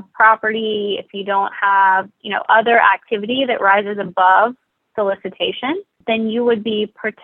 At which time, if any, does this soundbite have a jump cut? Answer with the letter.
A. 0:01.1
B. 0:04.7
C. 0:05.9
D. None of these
C